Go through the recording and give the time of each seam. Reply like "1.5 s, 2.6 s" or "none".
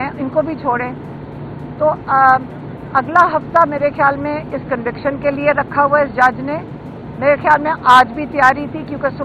none